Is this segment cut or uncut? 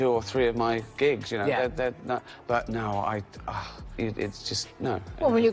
cut